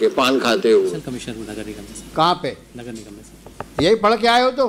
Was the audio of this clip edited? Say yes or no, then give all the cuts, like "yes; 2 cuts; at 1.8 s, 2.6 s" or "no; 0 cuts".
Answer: yes; 1 cut; at 1.0 s